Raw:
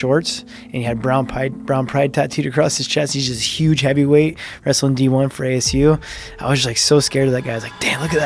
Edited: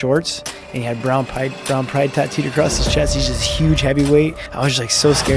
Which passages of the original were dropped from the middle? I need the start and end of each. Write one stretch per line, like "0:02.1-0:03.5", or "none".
0:04.4-0:06.3